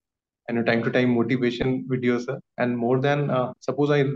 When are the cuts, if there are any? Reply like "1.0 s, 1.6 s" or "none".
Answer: 2.4 s